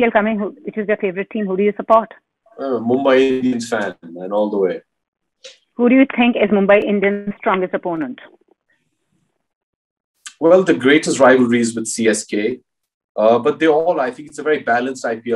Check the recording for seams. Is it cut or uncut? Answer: uncut